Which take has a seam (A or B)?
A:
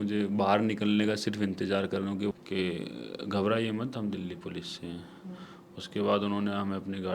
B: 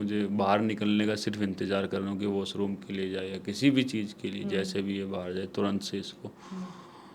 A